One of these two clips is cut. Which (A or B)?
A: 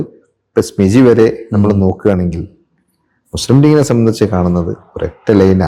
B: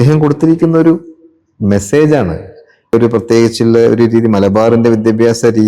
B